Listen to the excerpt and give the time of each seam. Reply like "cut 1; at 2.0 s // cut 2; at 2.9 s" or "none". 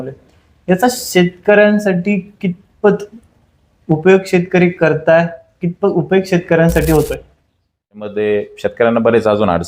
cut 1; at 8.1 s